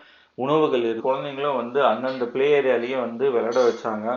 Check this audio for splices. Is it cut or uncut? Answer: cut